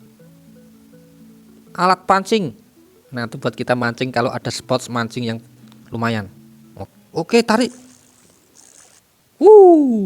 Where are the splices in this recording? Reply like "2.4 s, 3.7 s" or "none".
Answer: 6.7 s